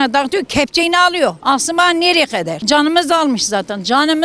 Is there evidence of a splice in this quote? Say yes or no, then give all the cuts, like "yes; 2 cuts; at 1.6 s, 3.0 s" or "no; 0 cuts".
yes; 2 cuts; at 1.4 s, 2.5 s